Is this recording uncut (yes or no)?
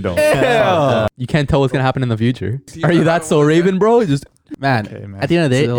no